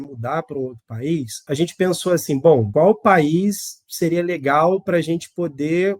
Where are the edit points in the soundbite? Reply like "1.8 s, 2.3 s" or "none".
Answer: 1.3 s, 2.7 s

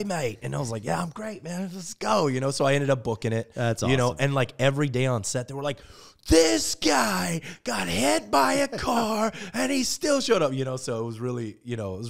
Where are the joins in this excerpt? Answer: none

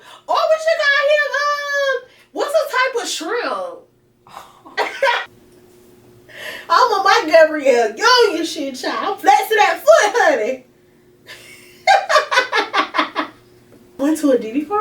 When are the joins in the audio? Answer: 5.2 s, 14.0 s

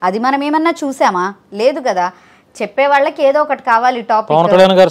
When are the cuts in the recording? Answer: none

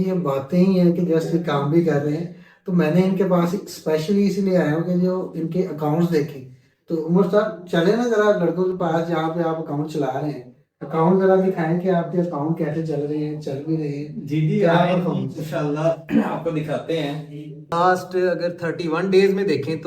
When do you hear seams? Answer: 17.7 s

